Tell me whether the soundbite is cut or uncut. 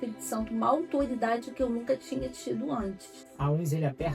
cut